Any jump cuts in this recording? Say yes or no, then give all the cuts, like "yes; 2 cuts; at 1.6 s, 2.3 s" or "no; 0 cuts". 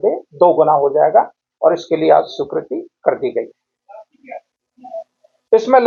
no; 0 cuts